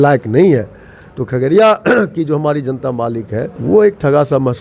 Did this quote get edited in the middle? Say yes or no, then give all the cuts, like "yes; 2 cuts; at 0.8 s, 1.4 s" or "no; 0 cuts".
yes; 1 cut; at 3.5 s